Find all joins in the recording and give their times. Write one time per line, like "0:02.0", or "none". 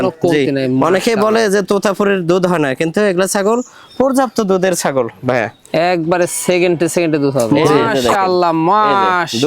0:07.5